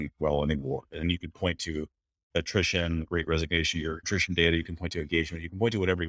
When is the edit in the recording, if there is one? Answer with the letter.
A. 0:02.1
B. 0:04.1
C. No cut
B